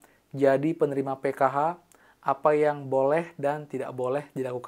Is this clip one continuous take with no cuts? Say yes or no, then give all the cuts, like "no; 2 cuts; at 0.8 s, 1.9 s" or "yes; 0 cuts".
yes; 0 cuts